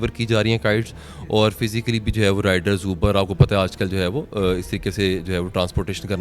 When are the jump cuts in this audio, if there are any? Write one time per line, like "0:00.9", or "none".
none

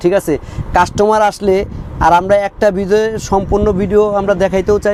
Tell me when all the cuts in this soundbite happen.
none

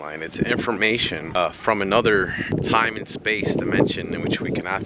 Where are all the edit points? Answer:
0:01.3
0:02.5

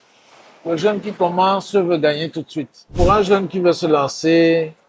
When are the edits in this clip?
0:02.9

